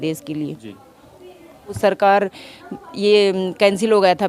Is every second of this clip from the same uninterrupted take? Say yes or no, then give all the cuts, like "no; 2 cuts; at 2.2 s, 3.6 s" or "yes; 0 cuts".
no; 1 cut; at 1.8 s